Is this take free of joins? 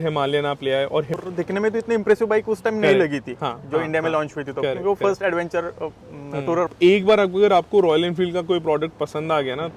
no; 2 cuts; at 1.1 s, 6.6 s

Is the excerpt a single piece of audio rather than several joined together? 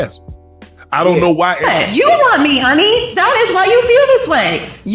no; 1 cut; at 1.6 s

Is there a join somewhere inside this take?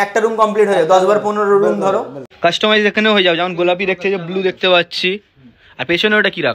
yes; 1 cut; at 2.2 s

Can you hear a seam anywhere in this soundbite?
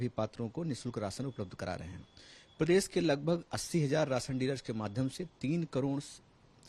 no; 0 cuts

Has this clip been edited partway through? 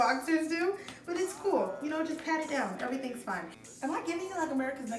yes; 1 cut; at 3.6 s

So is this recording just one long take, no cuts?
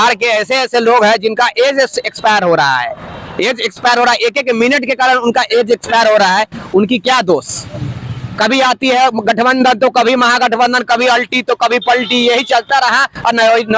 yes; 0 cuts

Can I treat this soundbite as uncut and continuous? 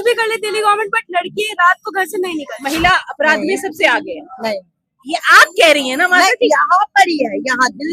no; 1 cut; at 2.5 s

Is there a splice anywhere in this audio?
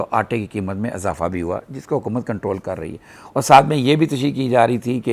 no; 0 cuts

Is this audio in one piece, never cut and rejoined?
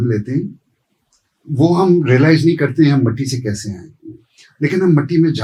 yes; 0 cuts

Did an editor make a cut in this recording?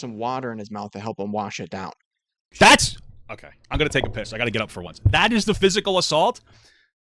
yes; 1 cut; at 2.5 s

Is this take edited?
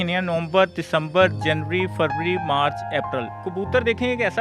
yes; 1 cut; at 3.4 s

